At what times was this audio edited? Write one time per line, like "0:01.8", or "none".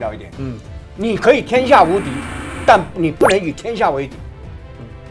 0:04.1